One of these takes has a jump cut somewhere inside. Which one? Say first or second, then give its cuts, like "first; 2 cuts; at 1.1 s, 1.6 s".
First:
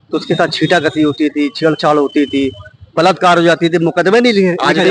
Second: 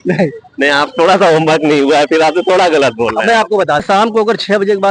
second; 1 cut; at 3.8 s